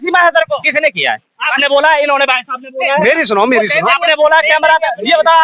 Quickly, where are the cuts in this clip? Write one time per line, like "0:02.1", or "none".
none